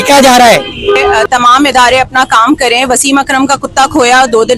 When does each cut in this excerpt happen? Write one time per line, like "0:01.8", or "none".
0:01.1

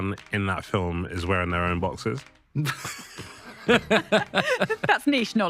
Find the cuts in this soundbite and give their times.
none

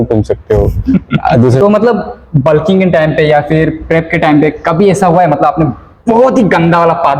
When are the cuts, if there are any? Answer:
0:01.6

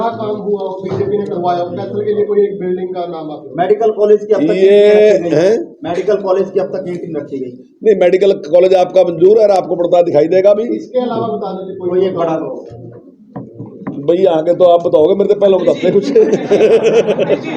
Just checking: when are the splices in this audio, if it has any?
none

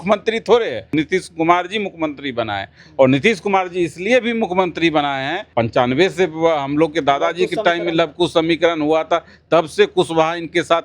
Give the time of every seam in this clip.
0:00.9
0:05.5

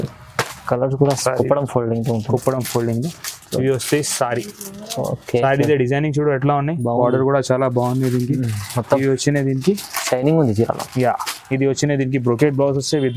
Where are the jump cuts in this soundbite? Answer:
0:01.2

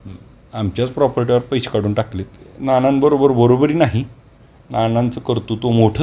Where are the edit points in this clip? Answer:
0:02.5

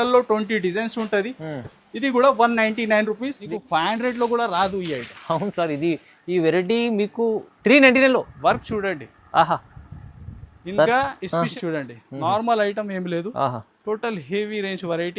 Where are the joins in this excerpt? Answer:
0:03.3
0:11.5

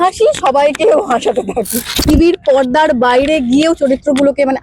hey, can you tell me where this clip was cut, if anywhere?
0:01.9

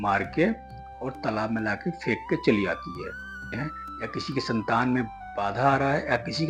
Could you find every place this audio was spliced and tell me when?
0:03.5

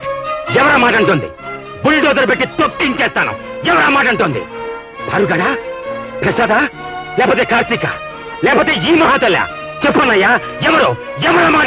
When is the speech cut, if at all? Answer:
none

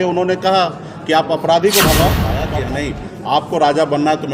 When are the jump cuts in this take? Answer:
0:02.4

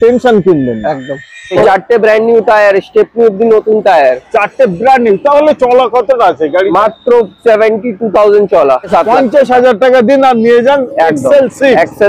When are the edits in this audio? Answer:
0:01.6
0:08.9

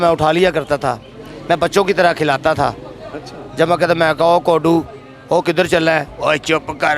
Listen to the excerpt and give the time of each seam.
none

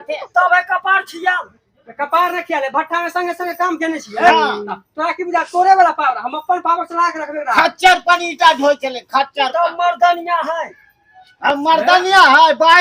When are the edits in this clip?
none

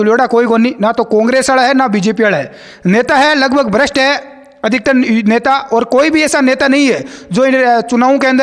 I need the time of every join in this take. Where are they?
none

